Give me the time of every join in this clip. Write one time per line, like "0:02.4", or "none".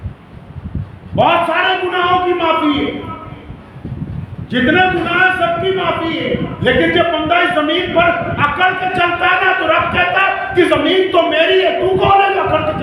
none